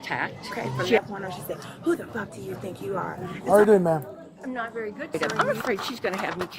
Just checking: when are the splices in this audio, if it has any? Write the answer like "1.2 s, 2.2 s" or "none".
1.0 s, 3.3 s, 5.2 s